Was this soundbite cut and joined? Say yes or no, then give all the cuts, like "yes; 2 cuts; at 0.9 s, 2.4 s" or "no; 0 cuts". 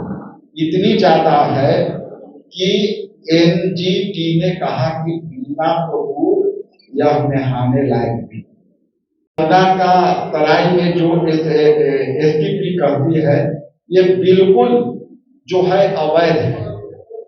yes; 1 cut; at 9.3 s